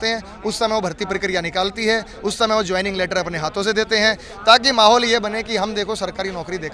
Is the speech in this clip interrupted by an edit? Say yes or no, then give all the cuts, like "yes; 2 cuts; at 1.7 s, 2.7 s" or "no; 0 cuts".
no; 0 cuts